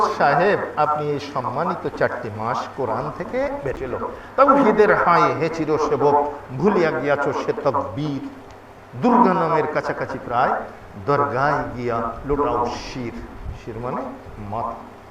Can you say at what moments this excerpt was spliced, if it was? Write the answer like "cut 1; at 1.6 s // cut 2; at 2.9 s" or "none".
cut 1; at 4.0 s